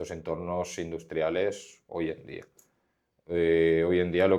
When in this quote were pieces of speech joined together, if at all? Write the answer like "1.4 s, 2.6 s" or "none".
none